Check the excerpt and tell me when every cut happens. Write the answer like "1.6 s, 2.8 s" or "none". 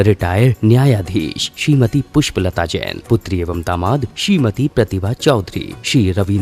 none

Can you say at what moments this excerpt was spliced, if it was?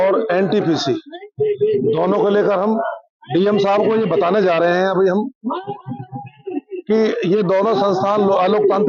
none

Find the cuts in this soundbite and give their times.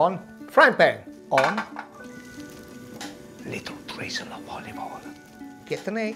none

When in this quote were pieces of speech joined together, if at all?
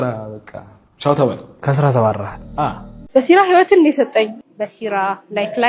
3.0 s

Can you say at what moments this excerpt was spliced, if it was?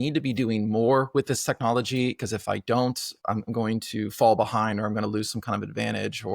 3.2 s

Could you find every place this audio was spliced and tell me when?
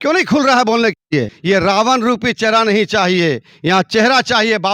1.3 s

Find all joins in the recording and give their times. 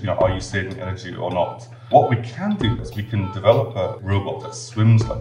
1.9 s, 2.8 s, 4.4 s

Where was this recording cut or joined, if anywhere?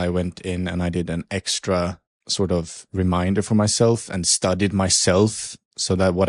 none

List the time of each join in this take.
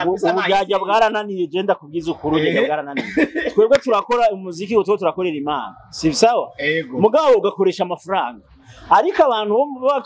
none

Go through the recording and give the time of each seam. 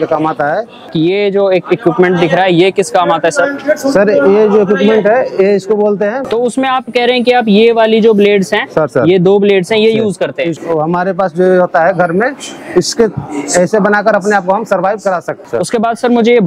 0.9 s, 6.2 s, 10.5 s, 15.3 s

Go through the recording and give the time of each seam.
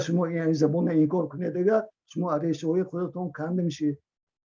none

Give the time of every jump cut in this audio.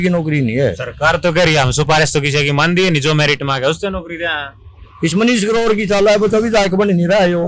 none

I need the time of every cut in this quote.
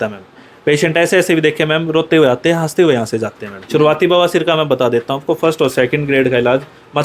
3.5 s

